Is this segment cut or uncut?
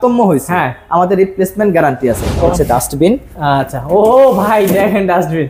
cut